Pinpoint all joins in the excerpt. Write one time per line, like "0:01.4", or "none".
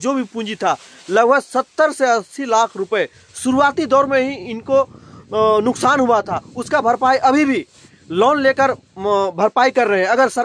none